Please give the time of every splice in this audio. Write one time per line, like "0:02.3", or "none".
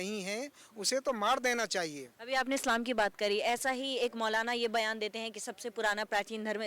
none